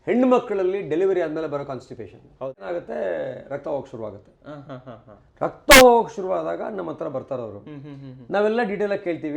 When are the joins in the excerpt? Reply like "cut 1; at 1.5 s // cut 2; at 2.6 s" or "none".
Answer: cut 1; at 2.6 s